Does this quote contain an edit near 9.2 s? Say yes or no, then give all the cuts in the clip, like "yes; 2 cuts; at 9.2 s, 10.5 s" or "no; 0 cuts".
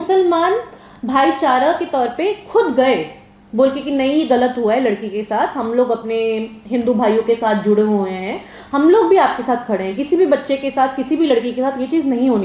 no; 0 cuts